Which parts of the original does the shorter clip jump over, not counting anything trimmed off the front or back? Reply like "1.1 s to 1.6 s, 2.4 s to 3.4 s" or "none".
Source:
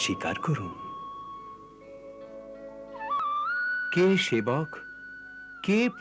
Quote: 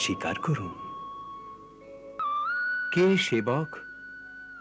2.2 s to 3.2 s